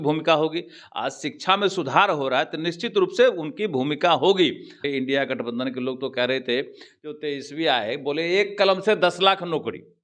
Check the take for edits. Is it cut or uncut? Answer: cut